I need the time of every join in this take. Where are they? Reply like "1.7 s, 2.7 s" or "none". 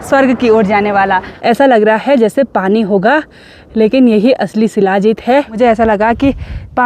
1.3 s, 5.5 s

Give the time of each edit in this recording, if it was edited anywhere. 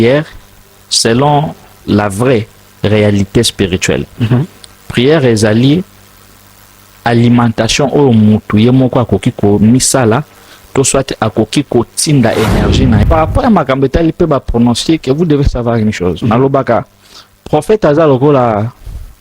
13.0 s

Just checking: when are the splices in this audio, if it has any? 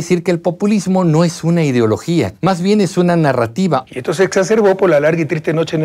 2.3 s, 3.8 s

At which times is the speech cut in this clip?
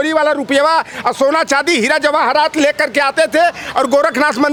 none

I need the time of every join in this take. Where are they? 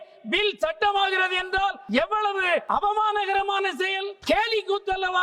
1.8 s, 2.6 s, 4.1 s

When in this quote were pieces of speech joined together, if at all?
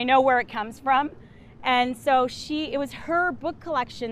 none

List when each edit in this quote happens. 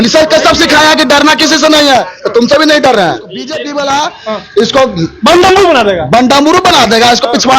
3.4 s

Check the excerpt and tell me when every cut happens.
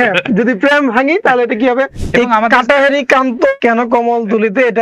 2.0 s, 3.6 s

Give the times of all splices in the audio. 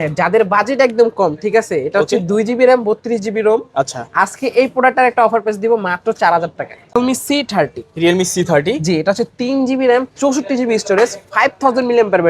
7.0 s

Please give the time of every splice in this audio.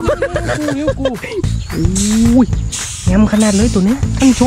1.4 s

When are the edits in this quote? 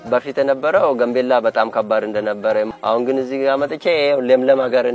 2.7 s

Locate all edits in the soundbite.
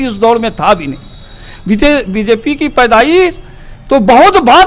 none

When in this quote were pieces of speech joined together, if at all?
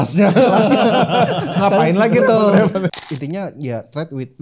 2.9 s

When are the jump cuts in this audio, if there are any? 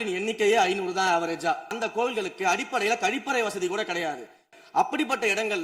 1.8 s, 4.5 s

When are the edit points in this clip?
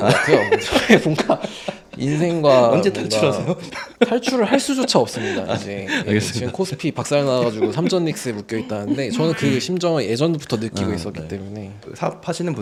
none

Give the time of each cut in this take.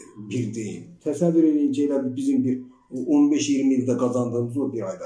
0.9 s

